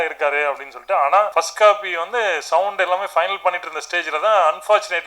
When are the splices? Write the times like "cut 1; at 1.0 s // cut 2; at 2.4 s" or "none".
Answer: cut 1; at 1.3 s